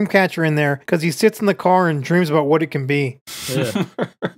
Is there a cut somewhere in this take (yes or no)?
no